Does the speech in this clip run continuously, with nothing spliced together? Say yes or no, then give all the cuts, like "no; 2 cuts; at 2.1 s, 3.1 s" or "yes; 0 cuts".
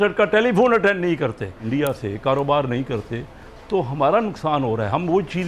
no; 1 cut; at 1.6 s